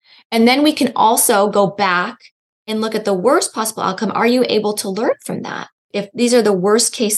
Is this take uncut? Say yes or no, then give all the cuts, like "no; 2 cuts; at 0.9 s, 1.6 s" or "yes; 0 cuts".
no; 1 cut; at 6.0 s